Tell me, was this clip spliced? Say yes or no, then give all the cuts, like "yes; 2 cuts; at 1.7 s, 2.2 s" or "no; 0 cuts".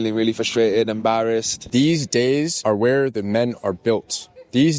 yes; 2 cuts; at 1.6 s, 2.5 s